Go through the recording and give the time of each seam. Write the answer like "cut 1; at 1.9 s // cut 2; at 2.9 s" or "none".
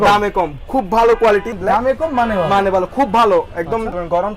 cut 1; at 1.5 s